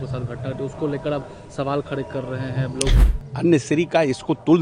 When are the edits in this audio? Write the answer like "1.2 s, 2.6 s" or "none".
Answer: 3.0 s